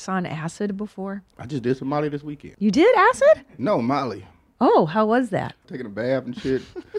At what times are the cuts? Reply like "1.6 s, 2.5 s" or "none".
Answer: 1.3 s, 2.4 s, 5.6 s